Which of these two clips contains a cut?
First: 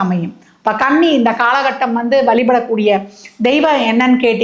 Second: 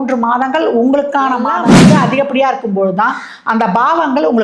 second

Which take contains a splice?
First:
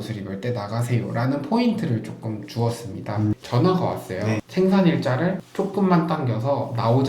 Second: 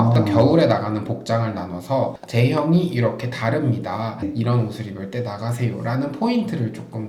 first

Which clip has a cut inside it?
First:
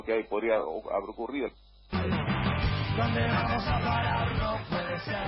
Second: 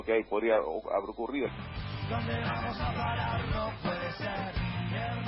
second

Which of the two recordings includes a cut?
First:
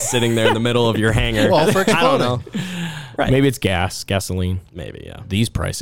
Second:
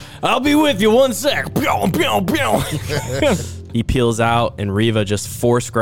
second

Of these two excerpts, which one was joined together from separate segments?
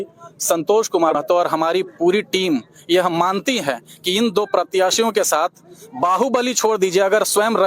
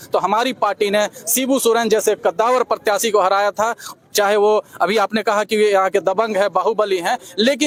first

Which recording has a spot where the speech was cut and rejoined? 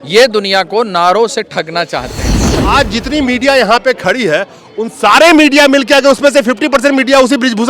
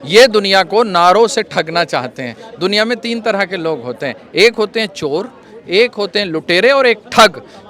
first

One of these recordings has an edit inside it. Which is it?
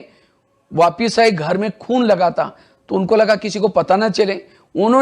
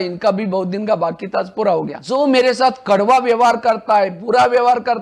second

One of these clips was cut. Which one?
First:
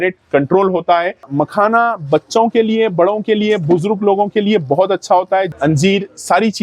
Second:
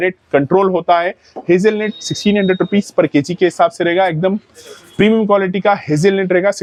first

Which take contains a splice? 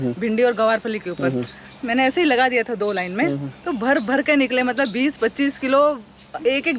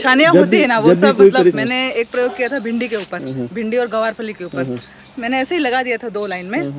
second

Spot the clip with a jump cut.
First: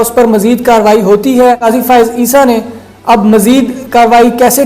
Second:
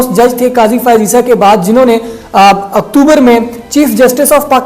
first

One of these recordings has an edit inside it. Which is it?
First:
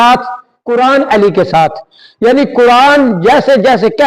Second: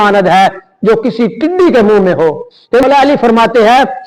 second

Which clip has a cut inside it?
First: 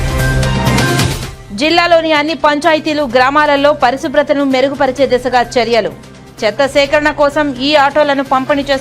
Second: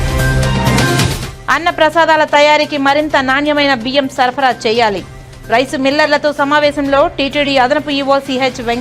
first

